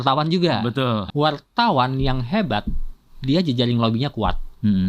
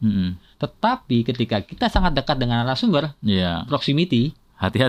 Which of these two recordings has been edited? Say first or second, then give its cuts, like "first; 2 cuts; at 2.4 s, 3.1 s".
first; 1 cut; at 1.1 s